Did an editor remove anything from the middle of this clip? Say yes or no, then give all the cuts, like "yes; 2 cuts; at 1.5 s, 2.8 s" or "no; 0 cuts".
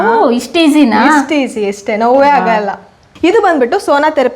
yes; 1 cut; at 3.0 s